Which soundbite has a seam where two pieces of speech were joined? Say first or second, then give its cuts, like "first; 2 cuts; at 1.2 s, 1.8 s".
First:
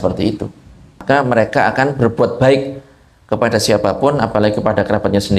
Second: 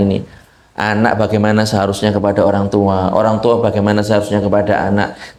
first; 1 cut; at 1.0 s